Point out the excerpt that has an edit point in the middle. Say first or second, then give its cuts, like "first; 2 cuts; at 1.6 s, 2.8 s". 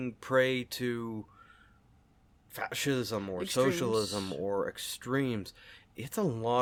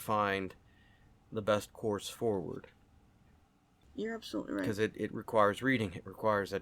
second; 1 cut; at 3.8 s